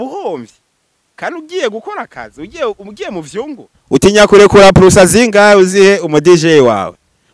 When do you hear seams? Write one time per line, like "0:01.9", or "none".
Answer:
0:03.7